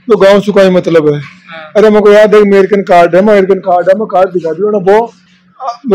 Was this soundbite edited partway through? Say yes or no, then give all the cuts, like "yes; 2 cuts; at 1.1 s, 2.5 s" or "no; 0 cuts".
no; 0 cuts